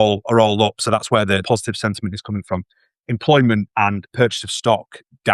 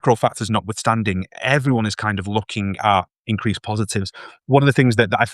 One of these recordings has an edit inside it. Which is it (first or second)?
first